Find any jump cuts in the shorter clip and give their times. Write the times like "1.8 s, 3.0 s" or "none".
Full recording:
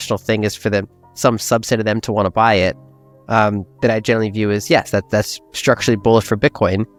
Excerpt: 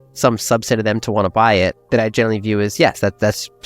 1.8 s